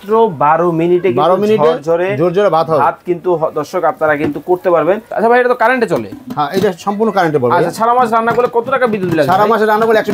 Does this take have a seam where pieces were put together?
yes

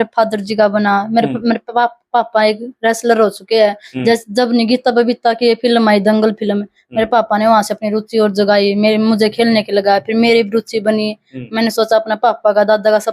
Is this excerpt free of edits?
yes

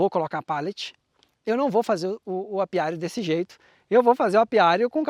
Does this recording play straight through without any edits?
yes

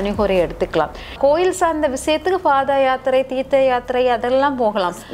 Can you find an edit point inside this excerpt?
yes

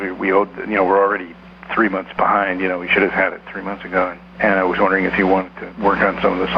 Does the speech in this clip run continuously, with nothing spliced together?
no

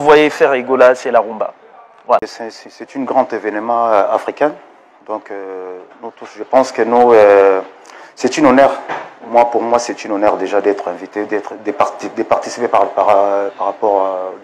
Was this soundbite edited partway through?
yes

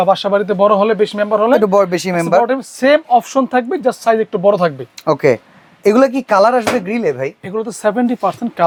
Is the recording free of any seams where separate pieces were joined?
yes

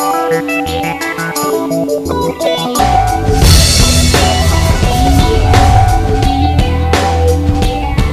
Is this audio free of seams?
yes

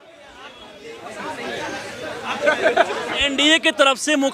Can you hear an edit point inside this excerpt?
yes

